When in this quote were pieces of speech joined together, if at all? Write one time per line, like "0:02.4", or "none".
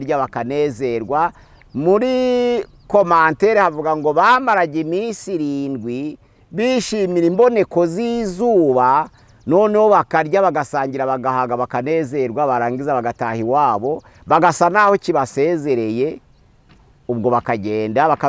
none